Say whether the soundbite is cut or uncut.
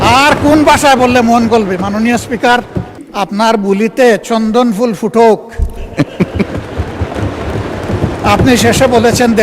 cut